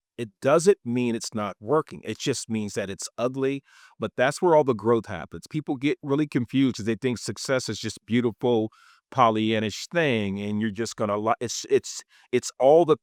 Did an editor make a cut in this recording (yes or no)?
no